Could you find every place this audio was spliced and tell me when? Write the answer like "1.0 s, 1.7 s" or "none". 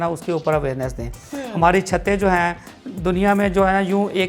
none